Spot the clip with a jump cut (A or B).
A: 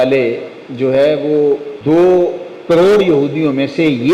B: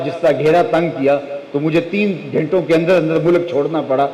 A